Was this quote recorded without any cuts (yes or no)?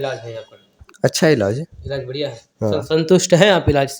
yes